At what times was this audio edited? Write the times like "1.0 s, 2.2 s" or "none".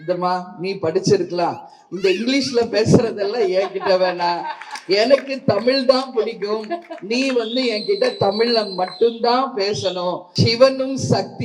10.2 s

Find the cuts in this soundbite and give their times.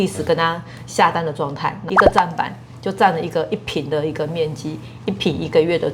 1.8 s

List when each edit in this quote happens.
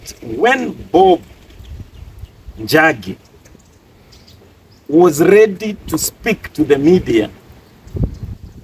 none

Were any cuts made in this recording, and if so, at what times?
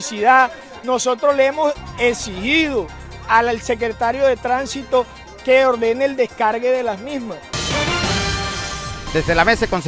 7.6 s

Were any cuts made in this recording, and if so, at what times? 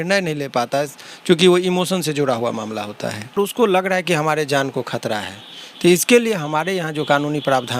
3.4 s

